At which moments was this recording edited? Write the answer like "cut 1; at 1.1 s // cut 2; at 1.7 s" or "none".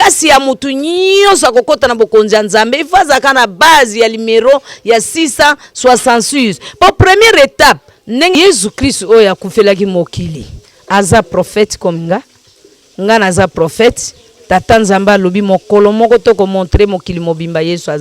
cut 1; at 8.3 s